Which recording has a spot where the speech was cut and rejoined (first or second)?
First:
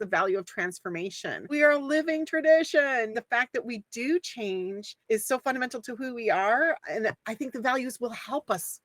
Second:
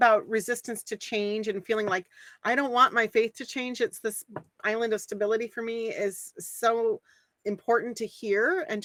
first